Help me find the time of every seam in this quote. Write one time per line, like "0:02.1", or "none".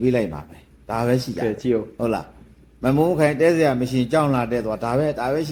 none

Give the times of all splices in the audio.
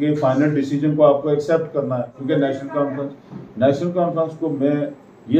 0:02.1

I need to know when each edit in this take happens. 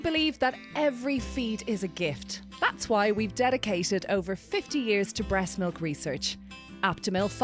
none

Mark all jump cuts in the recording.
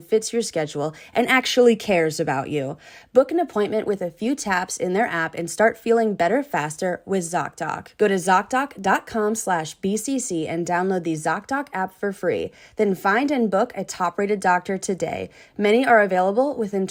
none

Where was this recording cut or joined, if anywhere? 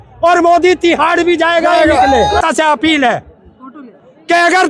0:02.4

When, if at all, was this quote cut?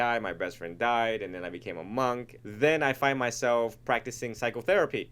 0:02.4

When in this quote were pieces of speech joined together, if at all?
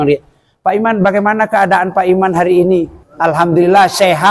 0:03.0

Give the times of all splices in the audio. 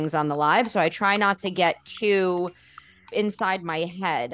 0:03.1

